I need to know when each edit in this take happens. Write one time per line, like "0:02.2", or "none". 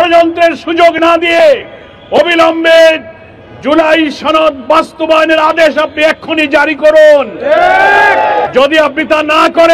0:08.5

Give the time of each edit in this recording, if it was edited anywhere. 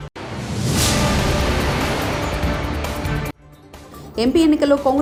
none

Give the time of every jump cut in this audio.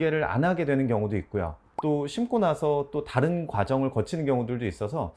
none

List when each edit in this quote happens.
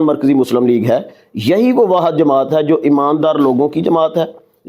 none

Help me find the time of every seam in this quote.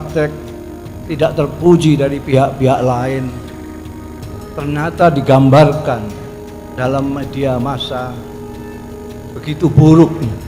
0:08.1
0:09.4

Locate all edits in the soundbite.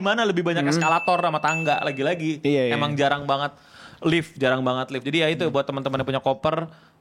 none

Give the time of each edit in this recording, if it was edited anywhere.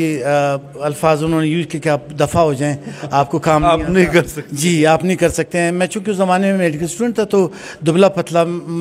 none

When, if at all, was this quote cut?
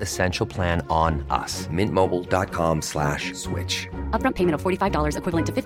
none

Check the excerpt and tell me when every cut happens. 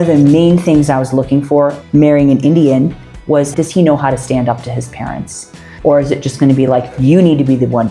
0:01.8
0:03.5
0:05.6

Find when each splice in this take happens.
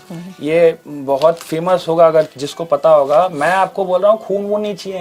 none

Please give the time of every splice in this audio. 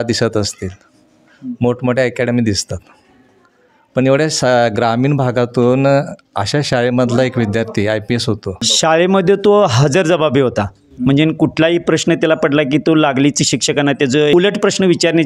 0:08.7
0:14.3

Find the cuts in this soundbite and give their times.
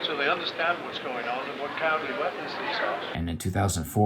0:03.1

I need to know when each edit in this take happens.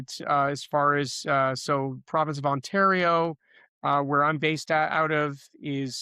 none

